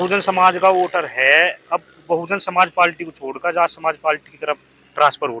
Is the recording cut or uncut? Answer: uncut